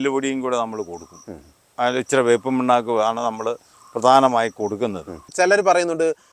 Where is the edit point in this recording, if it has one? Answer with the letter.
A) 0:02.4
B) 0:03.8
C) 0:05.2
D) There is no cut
C